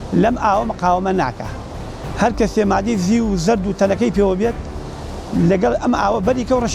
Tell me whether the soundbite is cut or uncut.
uncut